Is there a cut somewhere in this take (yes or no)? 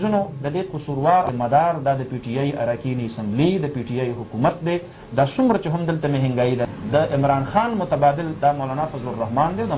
yes